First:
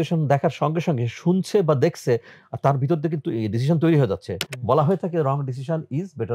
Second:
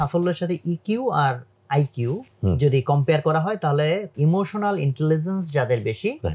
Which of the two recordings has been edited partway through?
second; 2 cuts; at 2.3 s, 4.1 s

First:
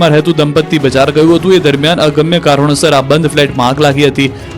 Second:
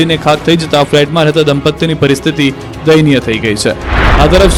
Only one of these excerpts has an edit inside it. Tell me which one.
first; 1 cut; at 3.3 s

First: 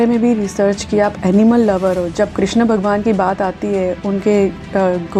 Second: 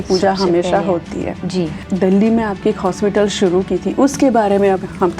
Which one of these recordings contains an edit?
second; 1 cut; at 1.8 s

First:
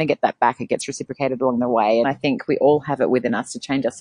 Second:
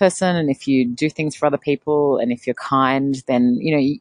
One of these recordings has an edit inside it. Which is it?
first; 1 cut; at 2.0 s

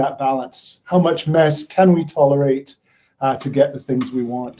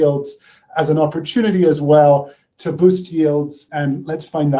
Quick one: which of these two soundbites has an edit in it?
second; 1 cut; at 3.6 s

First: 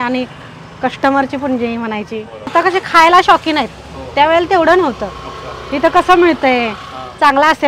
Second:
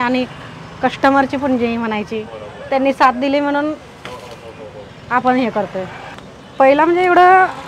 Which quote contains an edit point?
first; 1 cut; at 2.5 s

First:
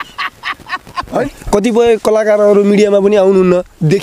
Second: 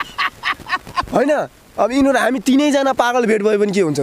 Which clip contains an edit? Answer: first; 1 cut; at 1.3 s

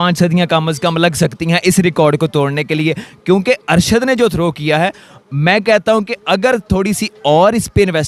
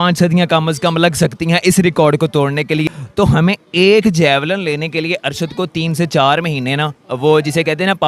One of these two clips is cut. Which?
second; 1 cut; at 3.0 s

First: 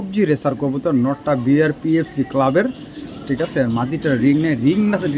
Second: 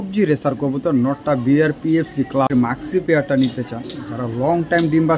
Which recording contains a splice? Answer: second; 1 cut; at 2.5 s

